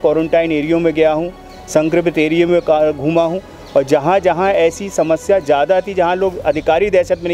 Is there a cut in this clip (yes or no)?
no